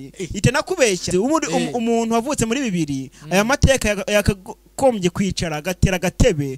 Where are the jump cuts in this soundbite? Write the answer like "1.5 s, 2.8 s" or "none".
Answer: 1.1 s

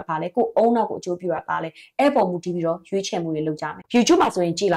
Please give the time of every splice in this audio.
3.8 s

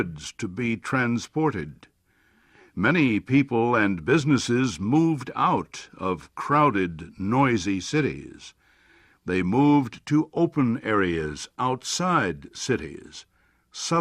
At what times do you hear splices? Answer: 9.7 s

